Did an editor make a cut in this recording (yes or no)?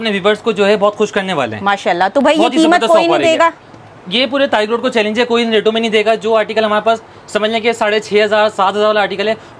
no